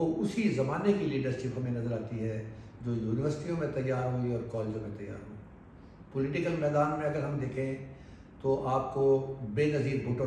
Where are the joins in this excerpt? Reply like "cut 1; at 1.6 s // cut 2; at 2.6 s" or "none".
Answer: none